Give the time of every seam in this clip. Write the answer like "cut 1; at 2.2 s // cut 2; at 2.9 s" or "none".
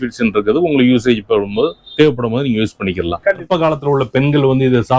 cut 1; at 3.4 s

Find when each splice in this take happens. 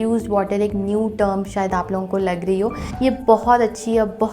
cut 1; at 2.8 s

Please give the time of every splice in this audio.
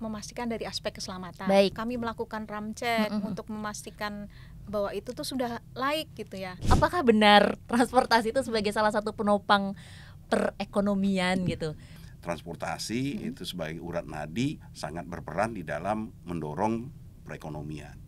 cut 1; at 1.7 s // cut 2; at 6.6 s // cut 3; at 12.0 s

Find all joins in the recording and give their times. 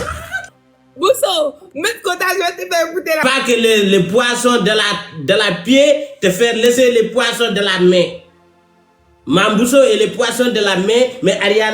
cut 1; at 3.2 s

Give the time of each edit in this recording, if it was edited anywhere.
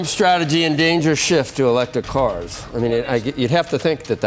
none

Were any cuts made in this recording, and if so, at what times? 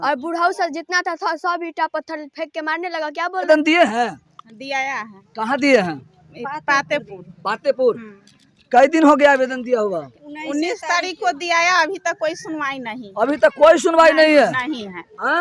cut 1; at 3.5 s

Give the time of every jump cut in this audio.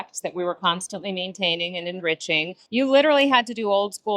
cut 1; at 2.6 s

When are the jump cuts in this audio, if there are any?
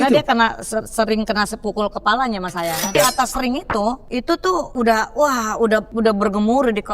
cut 1; at 2.9 s // cut 2; at 4.5 s // cut 3; at 5.9 s

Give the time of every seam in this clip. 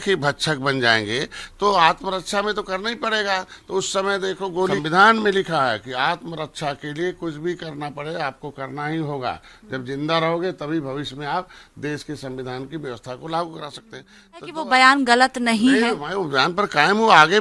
cut 1; at 4.8 s // cut 2; at 14.5 s

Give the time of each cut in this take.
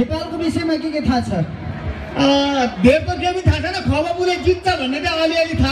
none

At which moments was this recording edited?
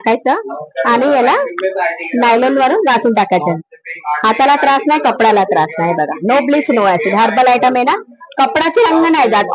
none

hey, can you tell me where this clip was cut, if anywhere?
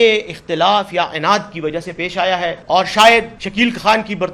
cut 1; at 2.6 s // cut 2; at 3.4 s

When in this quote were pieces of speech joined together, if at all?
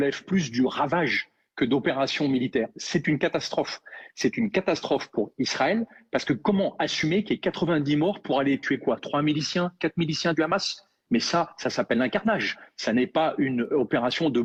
none

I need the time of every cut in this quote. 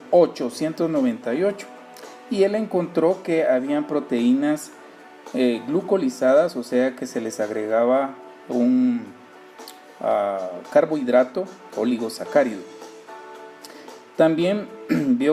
cut 1; at 13.1 s

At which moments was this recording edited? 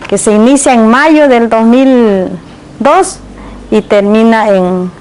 cut 1; at 1.4 s

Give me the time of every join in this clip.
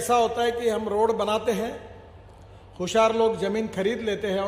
none

